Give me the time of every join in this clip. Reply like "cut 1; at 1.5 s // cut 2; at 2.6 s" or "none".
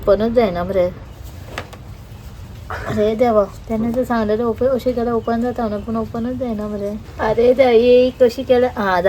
cut 1; at 1.1 s // cut 2; at 3.6 s // cut 3; at 7.0 s